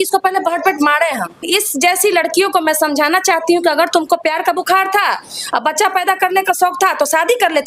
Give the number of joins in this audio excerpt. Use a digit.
1